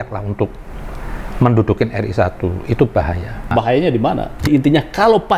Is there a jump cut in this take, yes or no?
yes